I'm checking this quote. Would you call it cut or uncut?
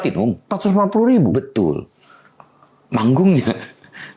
uncut